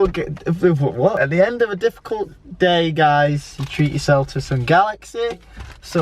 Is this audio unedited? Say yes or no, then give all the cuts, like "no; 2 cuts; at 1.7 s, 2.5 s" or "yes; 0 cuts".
no; 1 cut; at 1.2 s